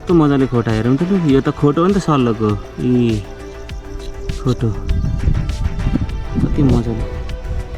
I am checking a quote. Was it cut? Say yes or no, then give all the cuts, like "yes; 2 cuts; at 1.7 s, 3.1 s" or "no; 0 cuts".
no; 0 cuts